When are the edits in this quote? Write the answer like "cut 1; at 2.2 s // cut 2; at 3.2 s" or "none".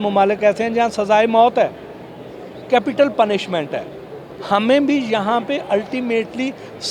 none